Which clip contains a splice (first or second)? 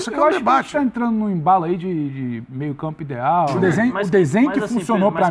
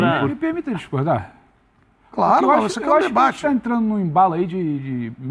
first